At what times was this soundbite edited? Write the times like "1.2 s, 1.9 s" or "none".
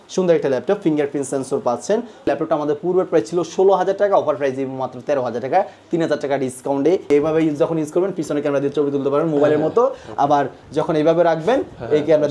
2.3 s, 7.1 s